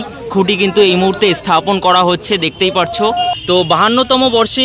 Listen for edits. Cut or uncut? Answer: cut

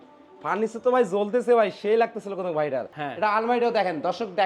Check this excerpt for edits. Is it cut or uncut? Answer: cut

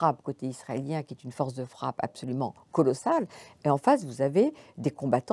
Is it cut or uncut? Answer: uncut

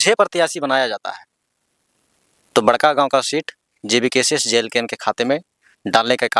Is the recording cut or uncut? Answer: uncut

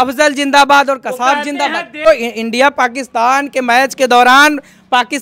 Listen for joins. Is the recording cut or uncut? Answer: cut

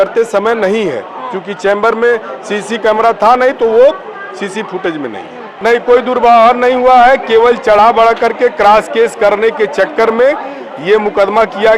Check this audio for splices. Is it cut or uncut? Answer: cut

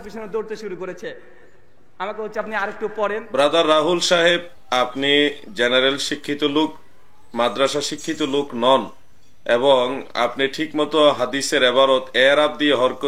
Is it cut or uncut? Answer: cut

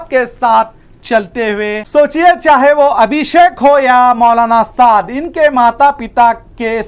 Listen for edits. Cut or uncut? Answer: cut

